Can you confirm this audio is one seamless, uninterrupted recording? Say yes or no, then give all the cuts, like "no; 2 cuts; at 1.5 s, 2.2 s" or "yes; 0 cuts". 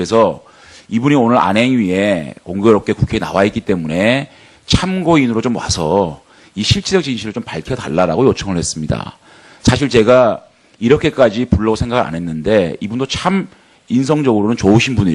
no; 1 cut; at 8.8 s